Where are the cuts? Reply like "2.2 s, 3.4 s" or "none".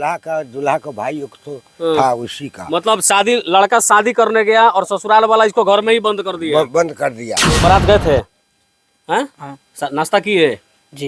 7.6 s